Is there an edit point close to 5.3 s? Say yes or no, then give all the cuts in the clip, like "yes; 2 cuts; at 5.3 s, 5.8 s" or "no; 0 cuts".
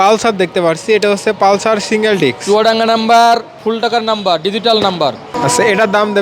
yes; 1 cut; at 5.3 s